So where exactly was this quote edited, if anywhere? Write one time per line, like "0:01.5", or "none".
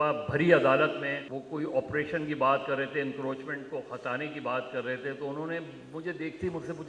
0:01.2